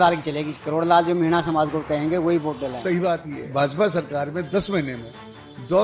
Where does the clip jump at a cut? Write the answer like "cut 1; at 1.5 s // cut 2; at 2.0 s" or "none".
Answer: cut 1; at 3.0 s